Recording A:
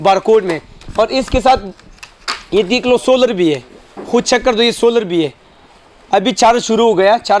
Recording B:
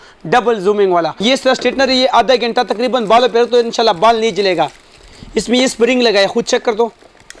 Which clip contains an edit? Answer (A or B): B